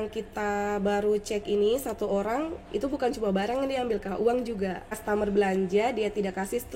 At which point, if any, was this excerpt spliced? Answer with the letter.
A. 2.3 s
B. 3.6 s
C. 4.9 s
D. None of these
C